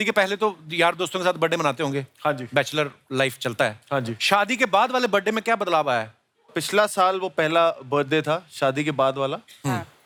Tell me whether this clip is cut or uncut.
uncut